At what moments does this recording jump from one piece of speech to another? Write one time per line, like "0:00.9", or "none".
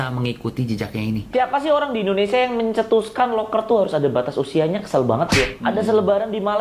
0:01.3